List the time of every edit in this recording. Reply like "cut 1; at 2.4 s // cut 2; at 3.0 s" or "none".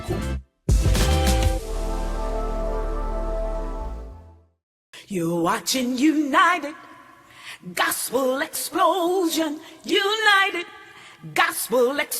cut 1; at 4.6 s